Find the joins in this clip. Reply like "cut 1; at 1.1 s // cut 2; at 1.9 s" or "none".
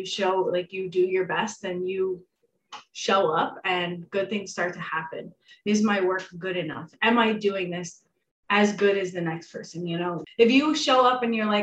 cut 1; at 5.5 s // cut 2; at 10.2 s